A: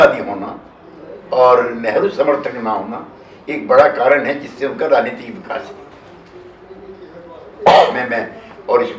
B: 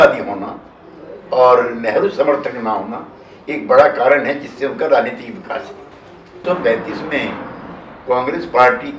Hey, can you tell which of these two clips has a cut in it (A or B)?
B